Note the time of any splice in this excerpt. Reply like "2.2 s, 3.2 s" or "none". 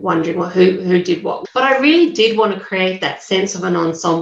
1.3 s